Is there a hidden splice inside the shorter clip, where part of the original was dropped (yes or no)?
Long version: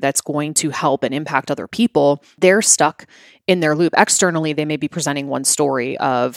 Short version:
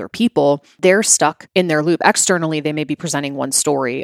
yes